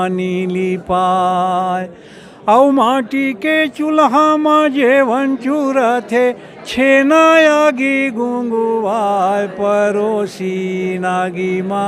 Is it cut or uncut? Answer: uncut